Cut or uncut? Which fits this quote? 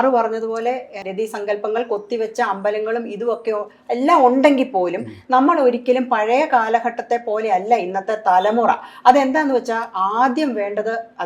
uncut